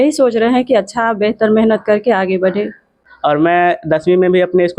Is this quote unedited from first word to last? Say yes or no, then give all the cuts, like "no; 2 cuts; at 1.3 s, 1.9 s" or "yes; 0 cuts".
no; 1 cut; at 3.0 s